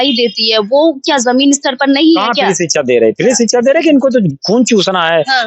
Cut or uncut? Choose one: uncut